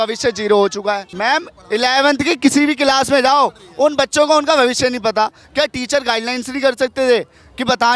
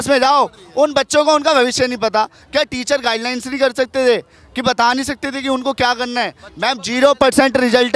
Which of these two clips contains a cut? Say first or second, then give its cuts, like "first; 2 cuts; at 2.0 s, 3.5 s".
first; 1 cut; at 1.1 s